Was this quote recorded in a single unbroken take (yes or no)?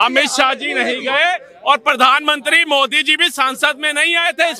yes